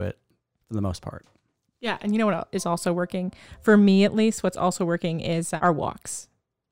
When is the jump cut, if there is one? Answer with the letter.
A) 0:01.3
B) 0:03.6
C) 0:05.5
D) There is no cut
C